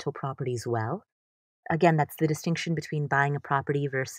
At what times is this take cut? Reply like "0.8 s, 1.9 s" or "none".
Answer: none